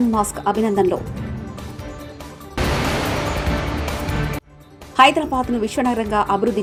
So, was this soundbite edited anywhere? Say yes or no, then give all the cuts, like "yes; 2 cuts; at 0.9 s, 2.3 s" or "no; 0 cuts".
no; 0 cuts